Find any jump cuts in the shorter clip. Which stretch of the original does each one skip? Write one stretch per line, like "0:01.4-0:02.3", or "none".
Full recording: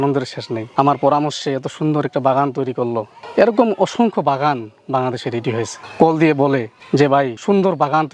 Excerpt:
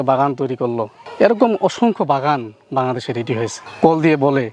none